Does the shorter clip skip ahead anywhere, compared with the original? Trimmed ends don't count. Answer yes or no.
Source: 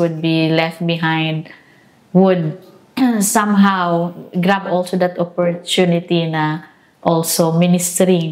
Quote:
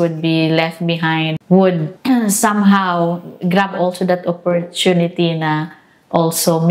yes